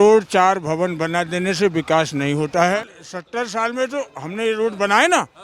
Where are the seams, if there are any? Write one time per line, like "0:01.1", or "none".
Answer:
0:02.8

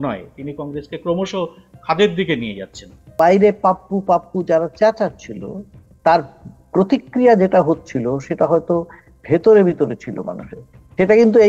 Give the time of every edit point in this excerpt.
0:03.1

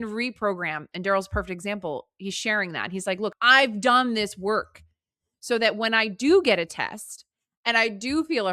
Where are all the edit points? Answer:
0:03.3

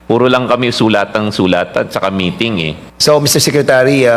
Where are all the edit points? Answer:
0:02.9

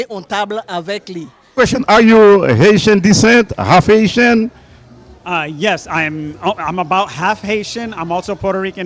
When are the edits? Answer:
0:01.5

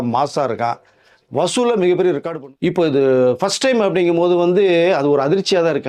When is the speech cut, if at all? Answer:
0:02.3

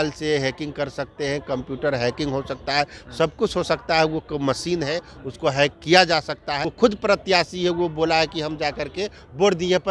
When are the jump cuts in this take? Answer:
0:06.6

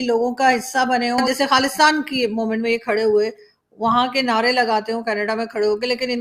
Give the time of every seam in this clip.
0:01.2

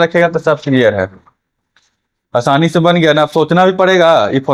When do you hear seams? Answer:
none

